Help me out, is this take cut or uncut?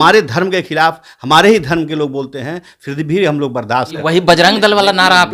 cut